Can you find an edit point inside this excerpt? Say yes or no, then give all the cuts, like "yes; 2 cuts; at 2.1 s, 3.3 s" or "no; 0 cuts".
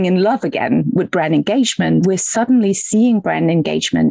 yes; 1 cut; at 2.0 s